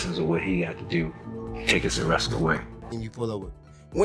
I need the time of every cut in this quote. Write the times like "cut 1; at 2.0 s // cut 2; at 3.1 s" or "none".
cut 1; at 3.0 s

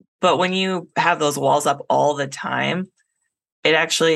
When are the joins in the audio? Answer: none

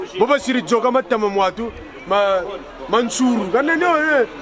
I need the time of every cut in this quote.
none

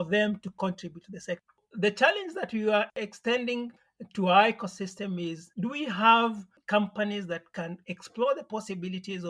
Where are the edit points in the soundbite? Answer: cut 1; at 1.6 s

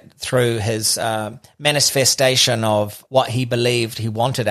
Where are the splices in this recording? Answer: cut 1; at 3.0 s

